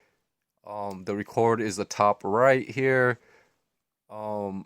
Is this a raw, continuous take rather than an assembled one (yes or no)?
no